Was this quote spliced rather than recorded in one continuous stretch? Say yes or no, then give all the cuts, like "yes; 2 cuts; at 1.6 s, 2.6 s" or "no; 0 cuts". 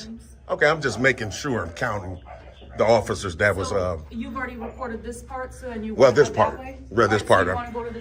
no; 0 cuts